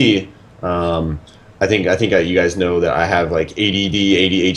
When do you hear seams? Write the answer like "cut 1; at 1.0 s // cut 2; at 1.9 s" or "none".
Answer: cut 1; at 1.3 s